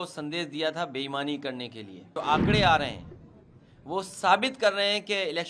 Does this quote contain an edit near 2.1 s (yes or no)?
yes